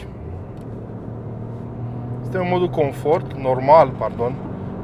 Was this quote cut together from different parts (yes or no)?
no